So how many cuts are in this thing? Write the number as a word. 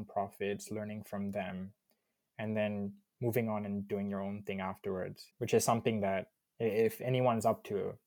one